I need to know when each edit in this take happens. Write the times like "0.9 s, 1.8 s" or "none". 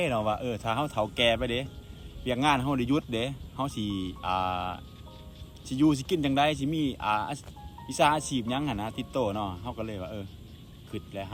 none